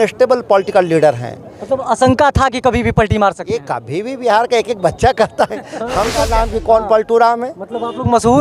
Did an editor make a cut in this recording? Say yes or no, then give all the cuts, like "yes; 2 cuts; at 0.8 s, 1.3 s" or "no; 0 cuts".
yes; 1 cut; at 6.3 s